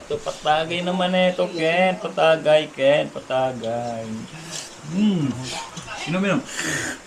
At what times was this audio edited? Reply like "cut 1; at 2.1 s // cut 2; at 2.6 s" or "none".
none